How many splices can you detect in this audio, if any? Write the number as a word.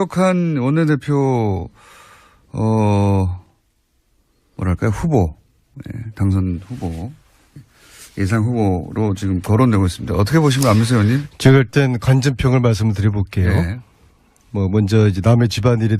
one